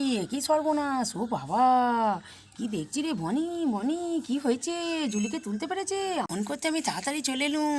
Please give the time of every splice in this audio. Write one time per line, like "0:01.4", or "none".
0:06.5